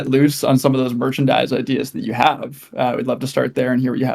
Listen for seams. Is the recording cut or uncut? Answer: uncut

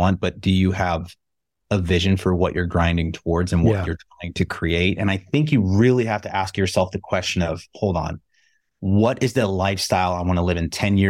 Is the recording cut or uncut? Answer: uncut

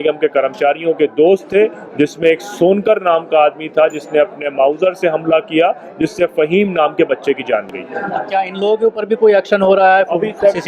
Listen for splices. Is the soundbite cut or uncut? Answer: uncut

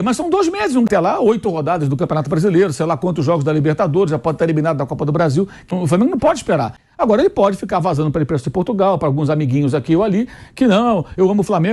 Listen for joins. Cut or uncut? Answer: cut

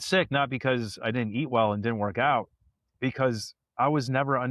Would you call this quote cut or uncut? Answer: uncut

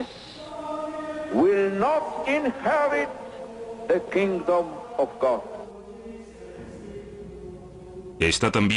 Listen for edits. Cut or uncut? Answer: cut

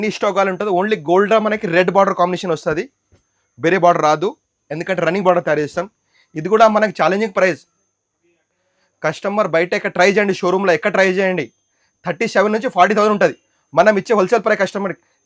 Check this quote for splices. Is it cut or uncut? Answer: uncut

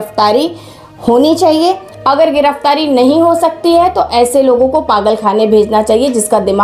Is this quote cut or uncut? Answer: uncut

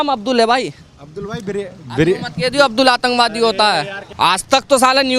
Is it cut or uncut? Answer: cut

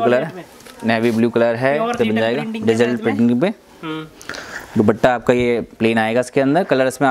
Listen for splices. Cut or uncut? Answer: cut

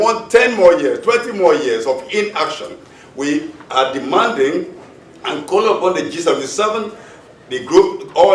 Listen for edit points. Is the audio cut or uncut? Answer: cut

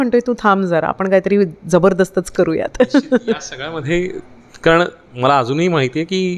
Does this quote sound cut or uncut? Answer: uncut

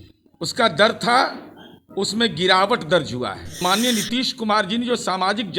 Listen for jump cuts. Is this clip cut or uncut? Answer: cut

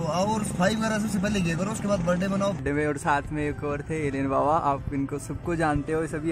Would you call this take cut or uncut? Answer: cut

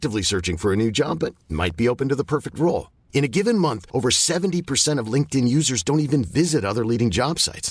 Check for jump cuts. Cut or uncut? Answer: uncut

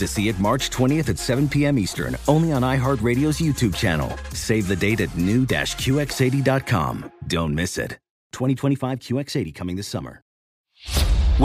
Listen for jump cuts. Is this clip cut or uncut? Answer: cut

